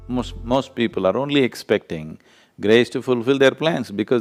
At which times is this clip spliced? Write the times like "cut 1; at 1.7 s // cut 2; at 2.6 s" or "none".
none